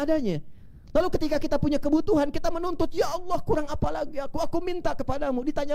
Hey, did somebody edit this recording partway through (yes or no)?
no